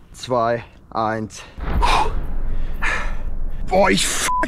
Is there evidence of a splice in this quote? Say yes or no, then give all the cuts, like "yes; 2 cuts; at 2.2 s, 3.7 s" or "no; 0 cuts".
no; 0 cuts